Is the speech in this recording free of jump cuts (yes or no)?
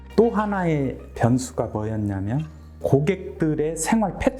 yes